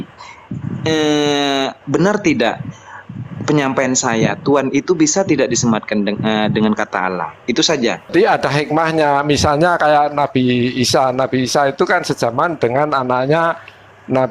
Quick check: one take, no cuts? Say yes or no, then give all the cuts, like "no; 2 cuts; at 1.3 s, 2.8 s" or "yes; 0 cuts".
no; 1 cut; at 8.1 s